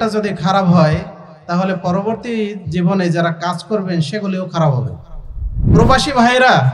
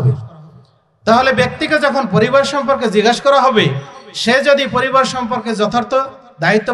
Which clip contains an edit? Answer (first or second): first